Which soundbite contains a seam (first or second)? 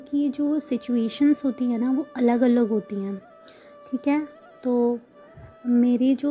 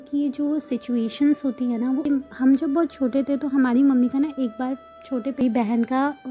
second